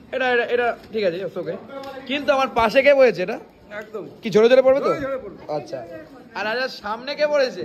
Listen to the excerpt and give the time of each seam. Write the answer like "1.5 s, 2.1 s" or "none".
none